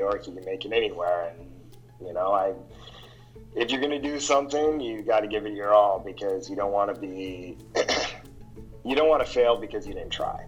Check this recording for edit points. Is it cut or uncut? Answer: uncut